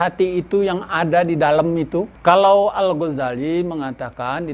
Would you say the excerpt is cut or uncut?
cut